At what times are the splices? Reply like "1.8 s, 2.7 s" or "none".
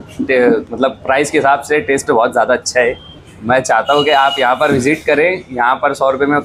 none